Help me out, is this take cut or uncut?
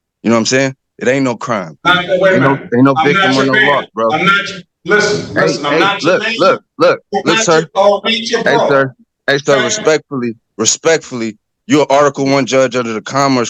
uncut